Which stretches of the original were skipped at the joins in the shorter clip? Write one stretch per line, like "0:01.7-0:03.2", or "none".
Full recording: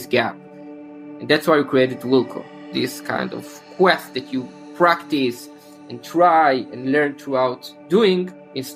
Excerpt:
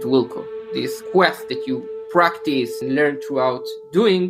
0:03.0-0:03.6
0:05.4-0:06.7